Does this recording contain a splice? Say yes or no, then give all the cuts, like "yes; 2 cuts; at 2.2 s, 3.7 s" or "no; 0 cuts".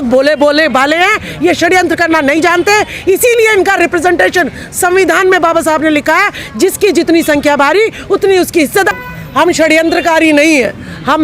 yes; 1 cut; at 8.9 s